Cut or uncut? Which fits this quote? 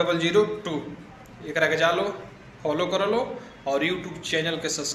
uncut